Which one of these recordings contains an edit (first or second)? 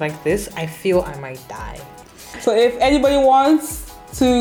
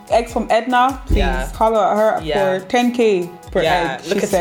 first